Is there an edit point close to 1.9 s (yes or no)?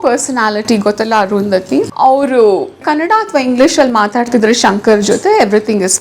yes